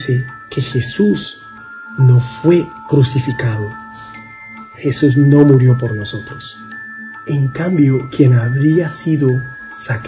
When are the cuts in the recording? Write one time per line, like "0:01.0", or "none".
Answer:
none